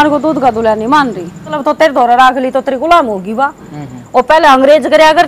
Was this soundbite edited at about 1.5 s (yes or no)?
yes